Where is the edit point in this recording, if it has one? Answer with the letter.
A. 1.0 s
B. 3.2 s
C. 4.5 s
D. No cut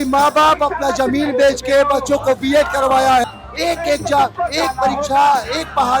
B